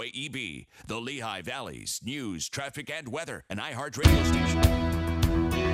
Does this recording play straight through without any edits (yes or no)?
no